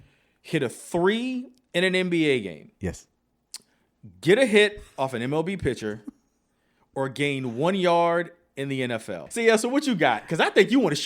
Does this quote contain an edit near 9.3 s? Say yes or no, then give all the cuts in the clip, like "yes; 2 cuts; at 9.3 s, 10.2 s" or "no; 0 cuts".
yes; 1 cut; at 9.3 s